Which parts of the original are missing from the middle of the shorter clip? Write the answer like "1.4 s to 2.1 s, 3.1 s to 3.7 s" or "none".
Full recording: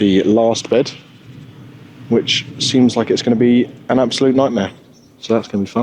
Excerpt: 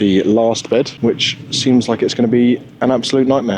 0.9 s to 2.0 s